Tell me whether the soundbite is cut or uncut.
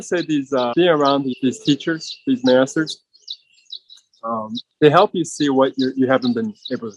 cut